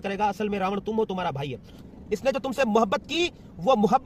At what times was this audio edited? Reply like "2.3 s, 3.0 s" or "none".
1.7 s

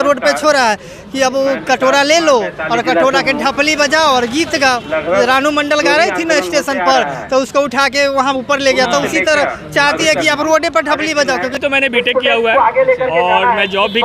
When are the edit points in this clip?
11.6 s

